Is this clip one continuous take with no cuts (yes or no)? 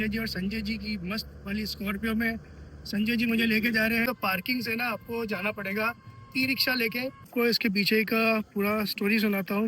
no